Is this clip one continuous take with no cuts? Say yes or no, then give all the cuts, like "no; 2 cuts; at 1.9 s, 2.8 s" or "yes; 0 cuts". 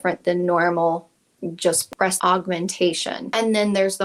no; 2 cuts; at 1.9 s, 3.3 s